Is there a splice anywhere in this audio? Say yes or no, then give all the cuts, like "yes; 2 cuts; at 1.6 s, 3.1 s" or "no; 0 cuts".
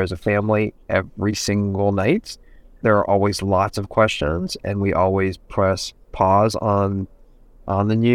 no; 0 cuts